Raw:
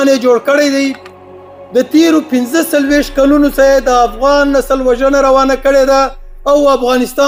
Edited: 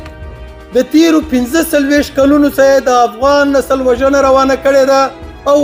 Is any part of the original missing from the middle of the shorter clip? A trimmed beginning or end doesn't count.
no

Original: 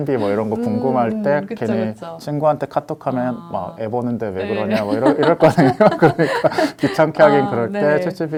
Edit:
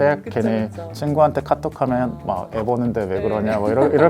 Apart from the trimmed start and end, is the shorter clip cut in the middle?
no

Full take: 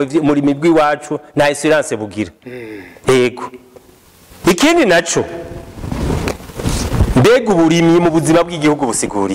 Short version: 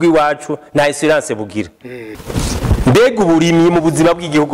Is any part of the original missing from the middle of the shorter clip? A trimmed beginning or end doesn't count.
yes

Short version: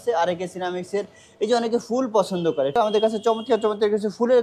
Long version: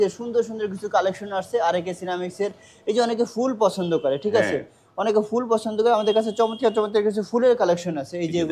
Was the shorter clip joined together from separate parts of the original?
yes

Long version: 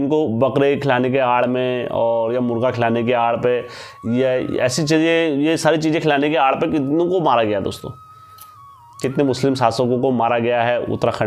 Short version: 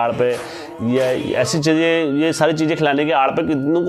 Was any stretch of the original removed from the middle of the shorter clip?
no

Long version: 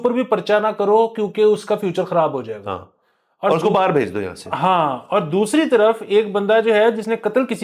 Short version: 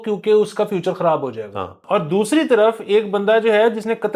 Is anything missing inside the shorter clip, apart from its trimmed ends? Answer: yes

